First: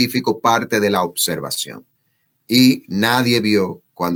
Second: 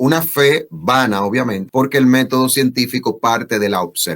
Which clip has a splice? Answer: second; 1 cut; at 1.6 s

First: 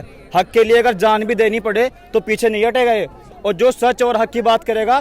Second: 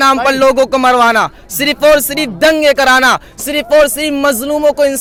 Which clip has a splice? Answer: first; 1 cut; at 3.3 s

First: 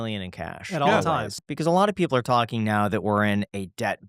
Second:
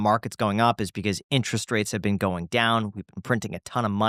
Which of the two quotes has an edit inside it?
first; 1 cut; at 1.3 s

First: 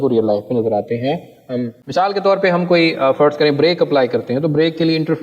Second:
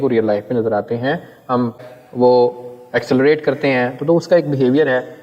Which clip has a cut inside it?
first; 1 cut; at 1.8 s

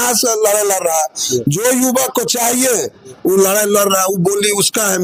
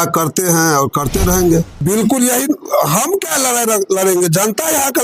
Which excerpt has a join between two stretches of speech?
second; 1 cut; at 1.8 s

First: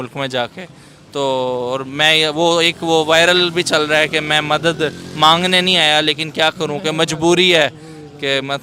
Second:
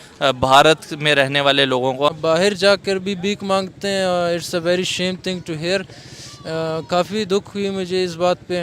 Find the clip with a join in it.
second; 1 cut; at 2.2 s

